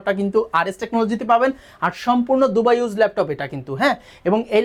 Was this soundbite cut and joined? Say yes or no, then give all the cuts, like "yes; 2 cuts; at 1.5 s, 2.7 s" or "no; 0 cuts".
no; 0 cuts